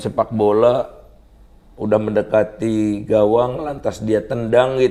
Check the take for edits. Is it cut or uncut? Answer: uncut